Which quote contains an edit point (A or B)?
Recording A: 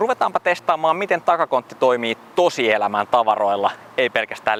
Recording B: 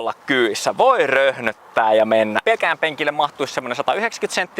B